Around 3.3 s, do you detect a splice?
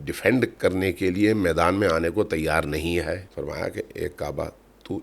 yes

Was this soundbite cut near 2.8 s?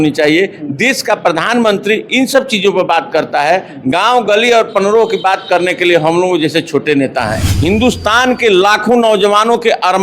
no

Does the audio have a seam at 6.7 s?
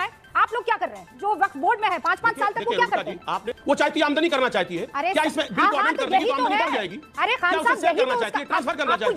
no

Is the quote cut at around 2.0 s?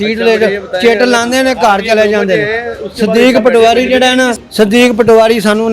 no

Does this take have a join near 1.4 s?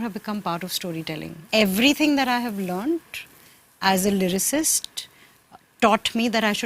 yes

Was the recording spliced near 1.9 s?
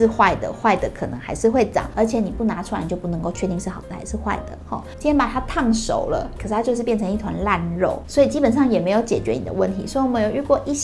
yes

